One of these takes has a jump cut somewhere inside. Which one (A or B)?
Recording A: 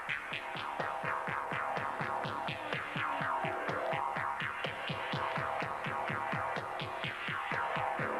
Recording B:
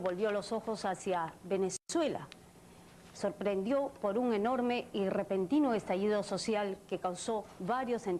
B